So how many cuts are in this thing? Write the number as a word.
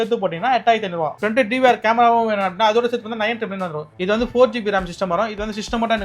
two